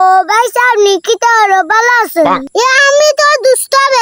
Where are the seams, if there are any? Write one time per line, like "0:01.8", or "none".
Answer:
0:02.5